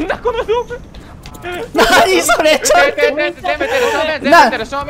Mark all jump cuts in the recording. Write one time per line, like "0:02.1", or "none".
none